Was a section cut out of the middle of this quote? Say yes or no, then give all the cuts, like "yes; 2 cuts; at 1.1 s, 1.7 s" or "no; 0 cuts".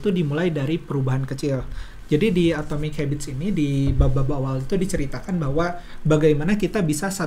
no; 0 cuts